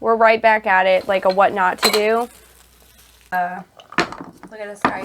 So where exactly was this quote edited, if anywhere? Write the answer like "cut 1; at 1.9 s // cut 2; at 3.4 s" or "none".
cut 1; at 3.2 s